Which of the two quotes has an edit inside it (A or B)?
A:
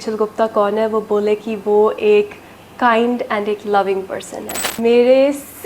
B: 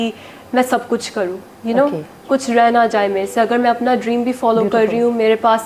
A